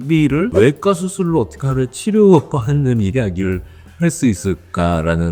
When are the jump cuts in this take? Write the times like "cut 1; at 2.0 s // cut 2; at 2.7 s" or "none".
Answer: none